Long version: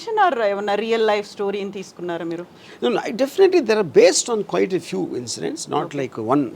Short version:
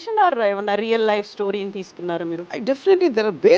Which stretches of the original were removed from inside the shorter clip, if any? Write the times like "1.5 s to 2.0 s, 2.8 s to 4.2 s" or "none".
2.6 s to 3.1 s